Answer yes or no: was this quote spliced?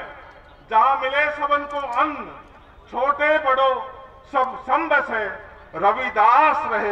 no